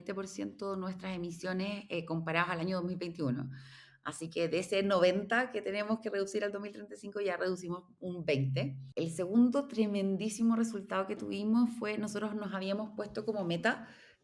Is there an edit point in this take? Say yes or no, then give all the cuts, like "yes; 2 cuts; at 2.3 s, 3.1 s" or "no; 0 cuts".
yes; 1 cut; at 8.7 s